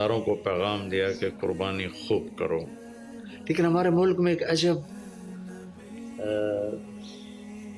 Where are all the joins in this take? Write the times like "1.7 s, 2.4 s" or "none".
none